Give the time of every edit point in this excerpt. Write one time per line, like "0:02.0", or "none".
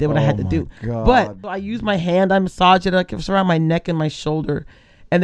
0:01.7